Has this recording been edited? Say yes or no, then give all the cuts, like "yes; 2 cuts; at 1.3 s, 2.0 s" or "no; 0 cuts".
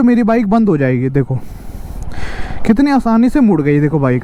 no; 0 cuts